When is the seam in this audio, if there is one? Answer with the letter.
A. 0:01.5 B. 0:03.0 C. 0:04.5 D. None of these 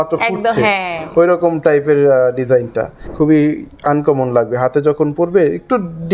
B